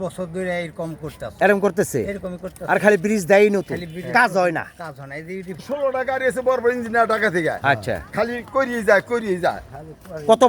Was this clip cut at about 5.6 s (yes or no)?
yes